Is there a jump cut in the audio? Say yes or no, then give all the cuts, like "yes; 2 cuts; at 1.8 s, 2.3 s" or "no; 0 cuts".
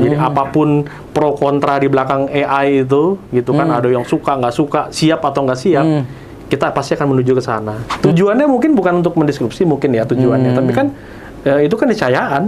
yes; 1 cut; at 7.8 s